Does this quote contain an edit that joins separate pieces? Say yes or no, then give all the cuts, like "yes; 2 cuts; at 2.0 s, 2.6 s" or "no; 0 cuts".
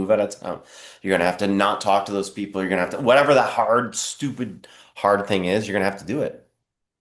no; 0 cuts